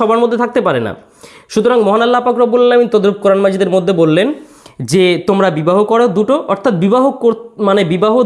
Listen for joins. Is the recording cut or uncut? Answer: uncut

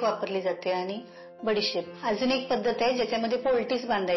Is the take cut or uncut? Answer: cut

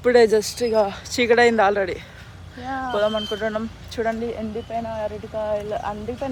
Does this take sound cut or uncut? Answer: uncut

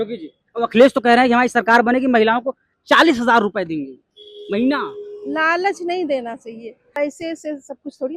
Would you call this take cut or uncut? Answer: cut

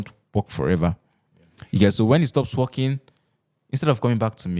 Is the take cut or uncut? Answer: uncut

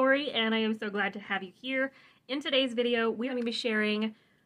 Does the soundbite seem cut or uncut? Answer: cut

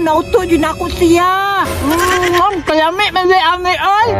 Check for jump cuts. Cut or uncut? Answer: cut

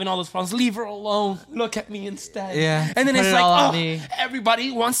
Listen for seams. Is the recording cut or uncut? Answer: uncut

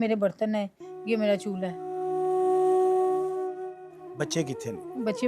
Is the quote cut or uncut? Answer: cut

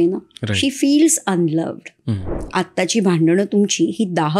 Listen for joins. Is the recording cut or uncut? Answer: cut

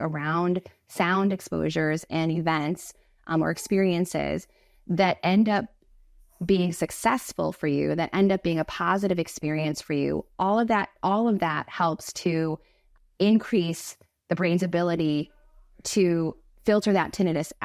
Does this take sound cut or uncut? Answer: uncut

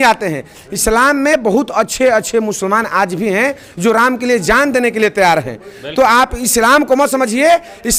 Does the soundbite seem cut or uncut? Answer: uncut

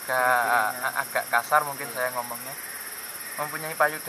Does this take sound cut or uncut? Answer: uncut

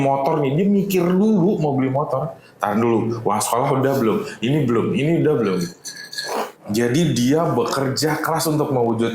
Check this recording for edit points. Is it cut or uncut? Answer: cut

